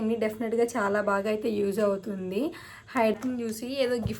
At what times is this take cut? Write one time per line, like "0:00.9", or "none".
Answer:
0:03.2